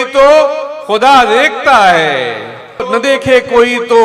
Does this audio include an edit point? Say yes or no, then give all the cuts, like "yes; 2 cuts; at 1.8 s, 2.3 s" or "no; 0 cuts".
yes; 1 cut; at 2.9 s